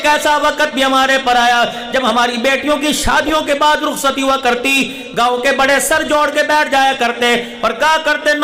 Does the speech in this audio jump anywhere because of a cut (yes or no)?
no